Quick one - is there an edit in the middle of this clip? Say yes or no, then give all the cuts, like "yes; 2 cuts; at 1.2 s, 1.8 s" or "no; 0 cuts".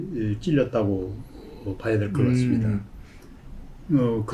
no; 0 cuts